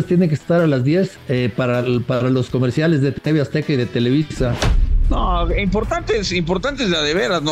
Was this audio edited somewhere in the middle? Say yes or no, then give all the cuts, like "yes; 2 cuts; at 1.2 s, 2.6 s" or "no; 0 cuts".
yes; 2 cuts; at 1.2 s, 5.0 s